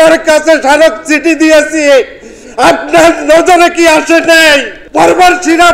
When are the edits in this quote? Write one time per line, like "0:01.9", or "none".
0:04.8